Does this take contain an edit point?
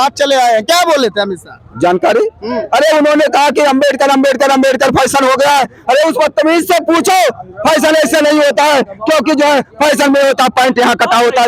no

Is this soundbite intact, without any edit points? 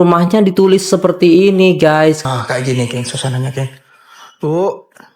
no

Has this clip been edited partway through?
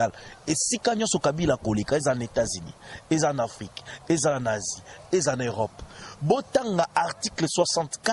no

